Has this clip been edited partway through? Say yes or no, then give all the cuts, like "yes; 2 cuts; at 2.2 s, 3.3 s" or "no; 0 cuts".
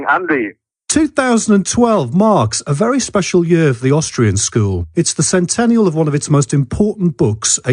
yes; 1 cut; at 5.5 s